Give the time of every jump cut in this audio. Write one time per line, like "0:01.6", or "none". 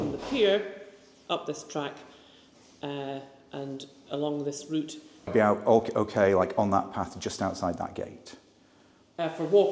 0:05.3